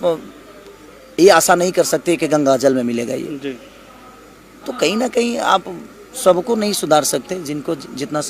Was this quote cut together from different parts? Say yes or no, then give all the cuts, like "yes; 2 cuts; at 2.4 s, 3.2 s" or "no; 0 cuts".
no; 0 cuts